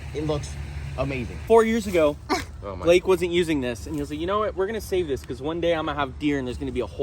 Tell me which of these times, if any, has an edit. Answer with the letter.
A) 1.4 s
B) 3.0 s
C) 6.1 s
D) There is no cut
A